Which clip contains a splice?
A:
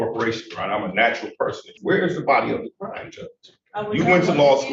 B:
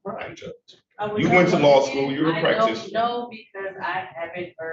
A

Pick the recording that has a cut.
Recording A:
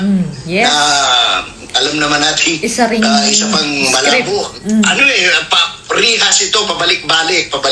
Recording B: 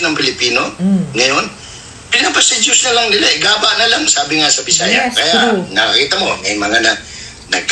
B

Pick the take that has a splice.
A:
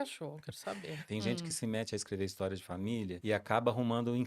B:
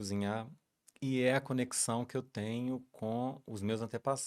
A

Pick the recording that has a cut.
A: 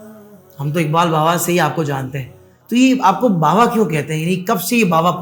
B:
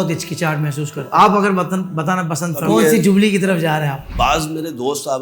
B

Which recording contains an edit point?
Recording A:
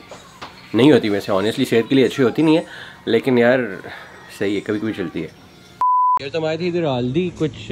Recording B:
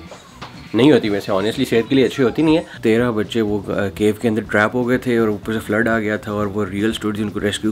B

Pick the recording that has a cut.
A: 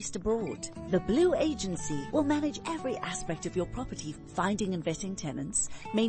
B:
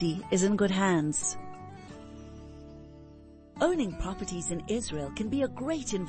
B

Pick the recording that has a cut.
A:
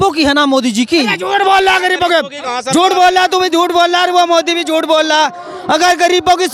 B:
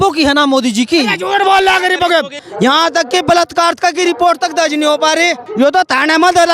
B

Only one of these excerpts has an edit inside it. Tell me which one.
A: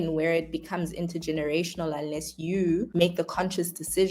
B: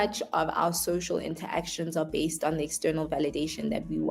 A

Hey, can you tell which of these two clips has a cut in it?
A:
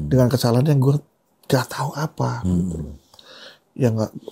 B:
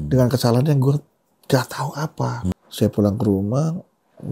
B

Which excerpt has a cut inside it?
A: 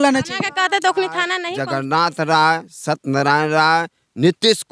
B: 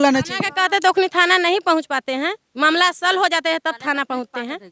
A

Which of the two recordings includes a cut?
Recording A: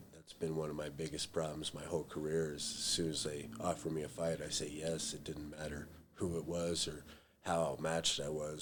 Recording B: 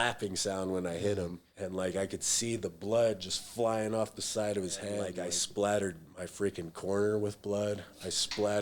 B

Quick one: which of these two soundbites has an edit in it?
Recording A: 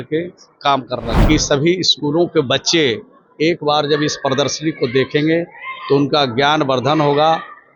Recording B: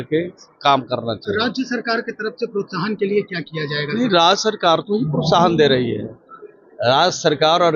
A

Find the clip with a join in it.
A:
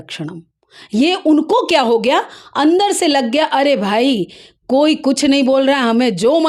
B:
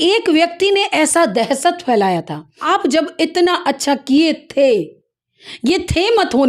B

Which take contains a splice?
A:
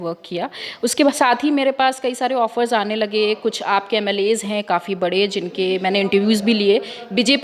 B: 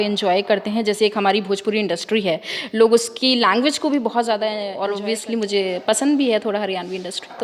B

